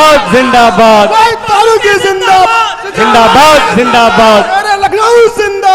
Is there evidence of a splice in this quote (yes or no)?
no